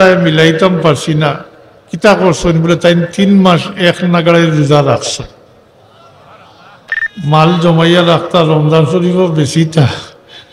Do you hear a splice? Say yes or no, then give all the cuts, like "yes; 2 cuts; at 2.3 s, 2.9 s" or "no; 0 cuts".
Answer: yes; 1 cut; at 7.0 s